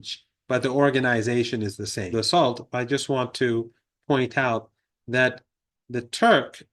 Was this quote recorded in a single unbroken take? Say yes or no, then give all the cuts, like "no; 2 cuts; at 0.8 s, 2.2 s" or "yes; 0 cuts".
no; 1 cut; at 2.0 s